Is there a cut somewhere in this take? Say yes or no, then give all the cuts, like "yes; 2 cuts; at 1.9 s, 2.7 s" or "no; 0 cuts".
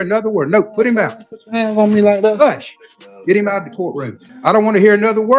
yes; 1 cut; at 4.2 s